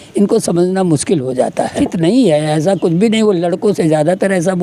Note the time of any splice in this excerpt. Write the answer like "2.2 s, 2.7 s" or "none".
1.8 s